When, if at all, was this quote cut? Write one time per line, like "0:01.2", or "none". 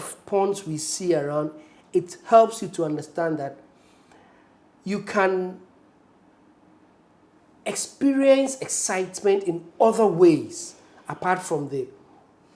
none